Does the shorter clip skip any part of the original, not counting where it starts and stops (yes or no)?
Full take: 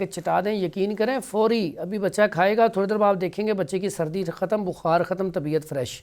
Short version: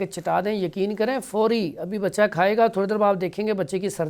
no